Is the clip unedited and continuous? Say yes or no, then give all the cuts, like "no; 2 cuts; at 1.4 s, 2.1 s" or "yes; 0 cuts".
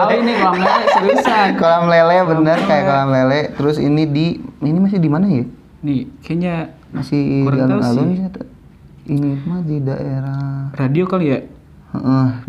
yes; 0 cuts